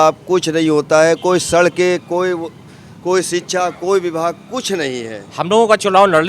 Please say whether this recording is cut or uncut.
cut